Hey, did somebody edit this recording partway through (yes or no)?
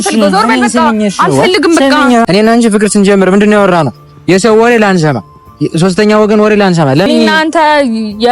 yes